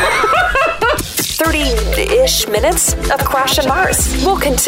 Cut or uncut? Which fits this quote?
cut